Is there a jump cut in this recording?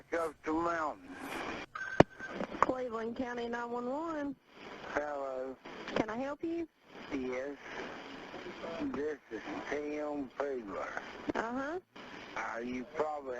yes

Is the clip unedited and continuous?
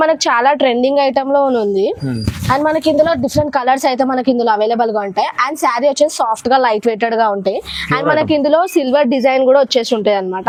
yes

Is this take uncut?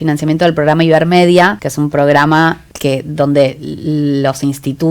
no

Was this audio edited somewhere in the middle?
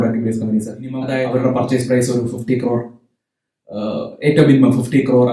yes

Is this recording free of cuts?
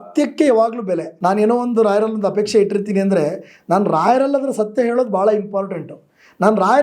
no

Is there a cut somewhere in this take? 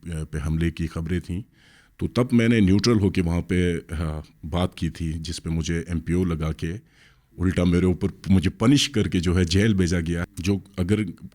yes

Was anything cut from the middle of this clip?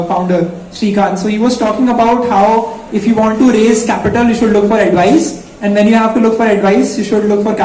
no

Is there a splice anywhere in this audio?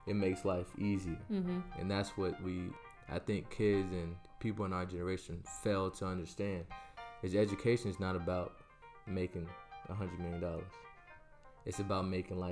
yes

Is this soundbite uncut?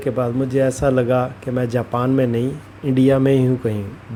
yes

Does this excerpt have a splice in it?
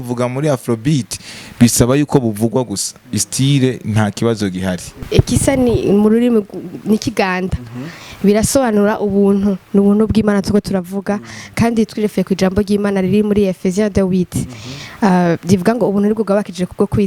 yes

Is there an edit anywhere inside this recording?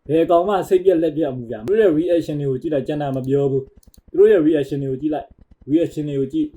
yes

